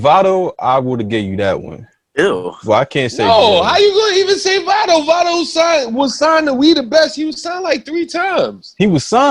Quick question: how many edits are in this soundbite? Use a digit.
0